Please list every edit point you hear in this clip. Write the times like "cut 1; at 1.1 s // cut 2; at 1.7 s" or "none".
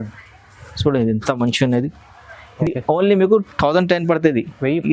none